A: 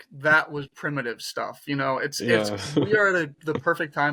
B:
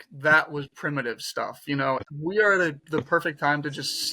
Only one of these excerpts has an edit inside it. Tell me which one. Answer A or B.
B